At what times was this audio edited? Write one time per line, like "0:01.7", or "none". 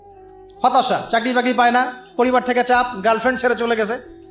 none